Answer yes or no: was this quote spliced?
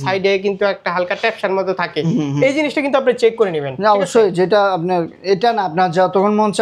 no